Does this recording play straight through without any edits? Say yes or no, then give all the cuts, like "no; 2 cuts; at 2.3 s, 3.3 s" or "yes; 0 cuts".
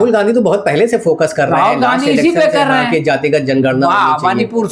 yes; 0 cuts